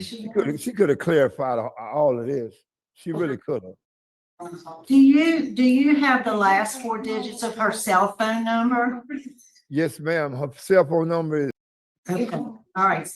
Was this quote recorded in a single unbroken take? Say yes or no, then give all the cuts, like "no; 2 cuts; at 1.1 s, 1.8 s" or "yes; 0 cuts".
no; 1 cut; at 11.6 s